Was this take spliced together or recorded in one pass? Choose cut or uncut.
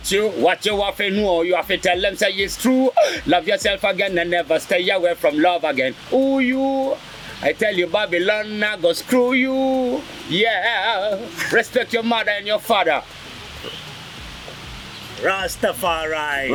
uncut